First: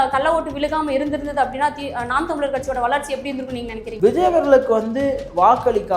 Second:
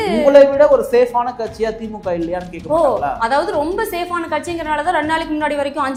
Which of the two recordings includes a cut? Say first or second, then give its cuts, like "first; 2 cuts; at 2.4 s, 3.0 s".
first; 1 cut; at 3.8 s